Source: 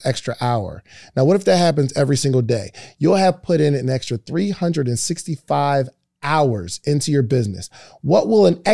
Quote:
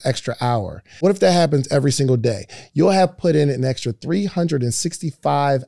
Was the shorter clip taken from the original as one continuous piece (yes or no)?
no